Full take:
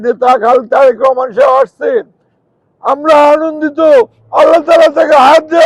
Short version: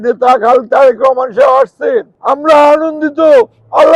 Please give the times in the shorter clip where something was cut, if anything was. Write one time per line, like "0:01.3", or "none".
0:02.1

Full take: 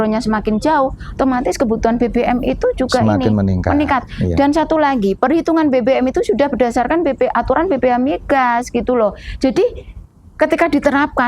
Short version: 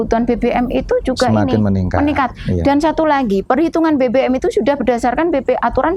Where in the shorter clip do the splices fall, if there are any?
none

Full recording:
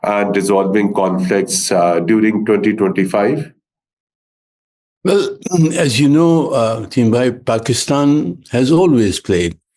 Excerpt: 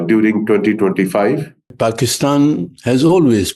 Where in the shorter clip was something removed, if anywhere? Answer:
0:01.7

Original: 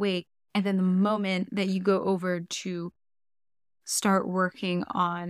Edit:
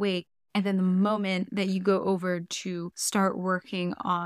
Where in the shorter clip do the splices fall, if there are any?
0:03.0

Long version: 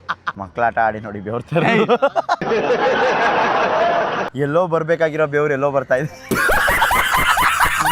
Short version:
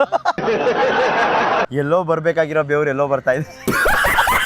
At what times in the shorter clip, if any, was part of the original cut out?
0:01.7

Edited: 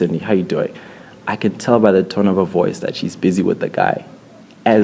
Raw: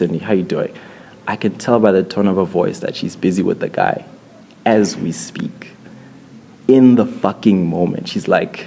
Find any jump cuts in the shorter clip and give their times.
none

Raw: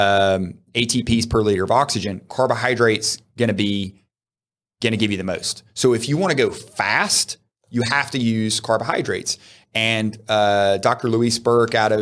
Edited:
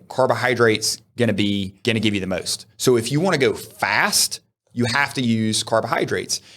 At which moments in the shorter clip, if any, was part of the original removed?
0:01.7

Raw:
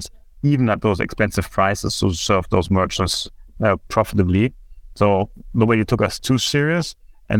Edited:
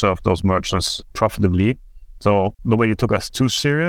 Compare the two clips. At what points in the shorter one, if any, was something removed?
0:01.1
0:02.6

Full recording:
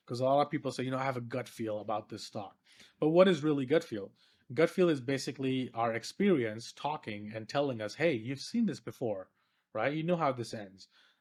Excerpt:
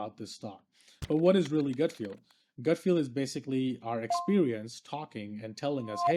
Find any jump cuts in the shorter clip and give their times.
none

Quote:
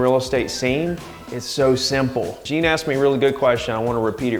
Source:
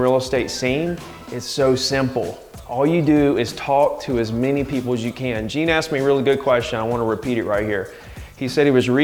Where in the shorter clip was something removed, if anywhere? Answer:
0:02.4

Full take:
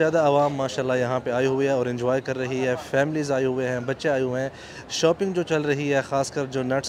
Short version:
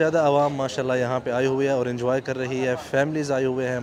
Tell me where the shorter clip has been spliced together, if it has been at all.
none

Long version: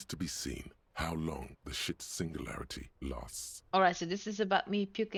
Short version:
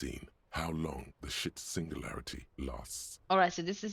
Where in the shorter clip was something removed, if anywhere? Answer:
none

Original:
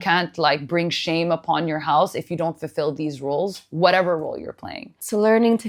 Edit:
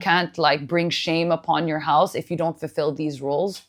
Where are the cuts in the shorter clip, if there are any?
none

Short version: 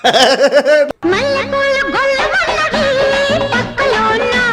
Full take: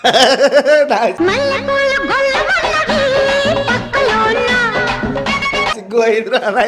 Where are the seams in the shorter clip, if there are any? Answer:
0:00.9

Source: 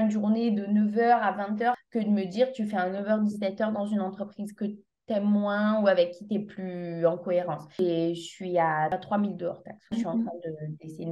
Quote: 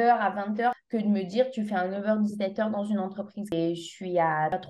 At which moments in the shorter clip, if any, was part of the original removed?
0:03.5

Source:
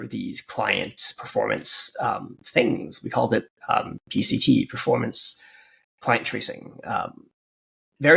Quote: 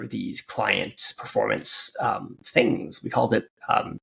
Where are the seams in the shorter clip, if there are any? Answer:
none

